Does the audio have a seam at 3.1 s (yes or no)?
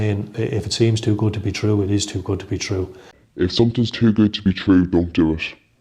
yes